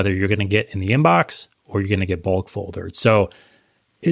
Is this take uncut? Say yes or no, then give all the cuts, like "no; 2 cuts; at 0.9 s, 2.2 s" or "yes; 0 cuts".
yes; 0 cuts